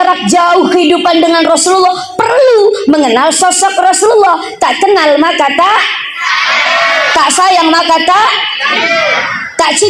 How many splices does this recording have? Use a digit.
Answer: 0